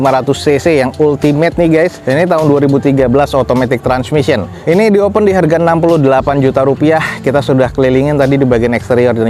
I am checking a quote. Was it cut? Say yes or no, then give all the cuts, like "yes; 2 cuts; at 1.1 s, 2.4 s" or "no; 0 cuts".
no; 0 cuts